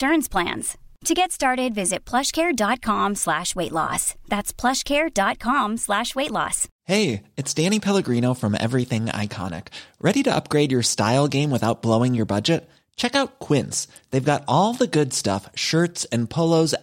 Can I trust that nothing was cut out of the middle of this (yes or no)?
no